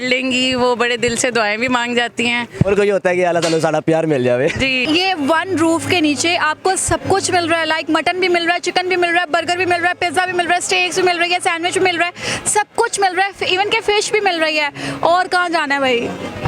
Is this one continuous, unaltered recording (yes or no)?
no